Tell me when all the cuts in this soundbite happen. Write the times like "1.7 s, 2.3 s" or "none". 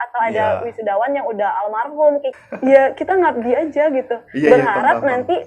2.3 s